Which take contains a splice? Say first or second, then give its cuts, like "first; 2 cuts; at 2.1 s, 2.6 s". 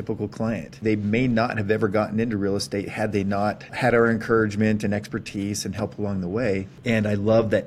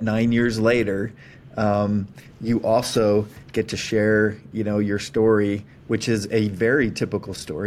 first; 3 cuts; at 0.8 s, 3.7 s, 6.7 s